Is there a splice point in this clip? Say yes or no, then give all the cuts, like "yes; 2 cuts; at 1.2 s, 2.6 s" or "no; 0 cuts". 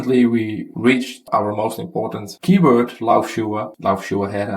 yes; 2 cuts; at 1.2 s, 3.7 s